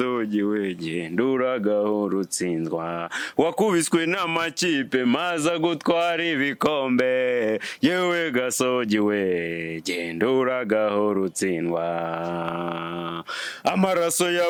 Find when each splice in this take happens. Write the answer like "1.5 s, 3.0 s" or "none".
none

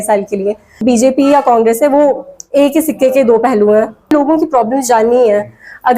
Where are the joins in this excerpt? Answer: 0.8 s, 4.1 s

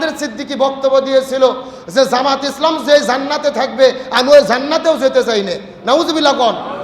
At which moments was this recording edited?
none

